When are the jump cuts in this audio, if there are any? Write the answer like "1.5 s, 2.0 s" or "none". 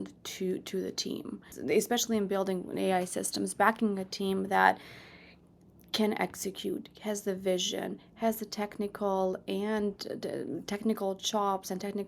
1.5 s